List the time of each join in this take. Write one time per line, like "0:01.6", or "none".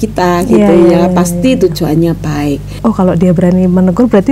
0:02.8